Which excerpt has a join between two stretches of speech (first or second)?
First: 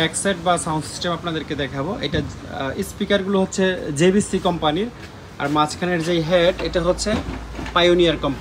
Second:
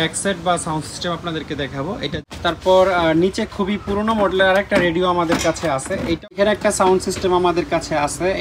second